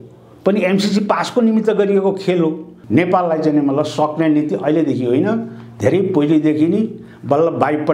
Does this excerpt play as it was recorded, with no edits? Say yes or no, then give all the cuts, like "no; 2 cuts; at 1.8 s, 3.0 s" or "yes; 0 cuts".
no; 1 cut; at 2.7 s